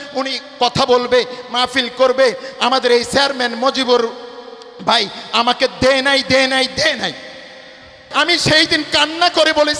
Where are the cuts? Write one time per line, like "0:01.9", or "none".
0:08.0